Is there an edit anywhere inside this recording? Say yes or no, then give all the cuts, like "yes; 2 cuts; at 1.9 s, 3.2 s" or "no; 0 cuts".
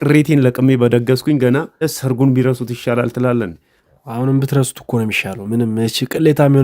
yes; 1 cut; at 1.9 s